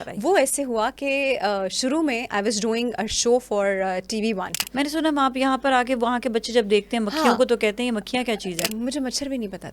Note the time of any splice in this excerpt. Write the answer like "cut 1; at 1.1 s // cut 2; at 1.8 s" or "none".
cut 1; at 4.6 s // cut 2; at 8.7 s